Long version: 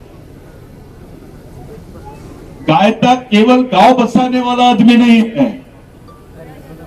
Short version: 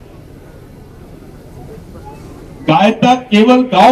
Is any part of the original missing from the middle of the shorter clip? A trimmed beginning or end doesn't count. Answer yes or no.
no